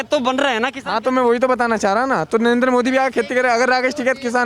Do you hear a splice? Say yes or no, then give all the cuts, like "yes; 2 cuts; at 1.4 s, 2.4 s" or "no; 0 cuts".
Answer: no; 0 cuts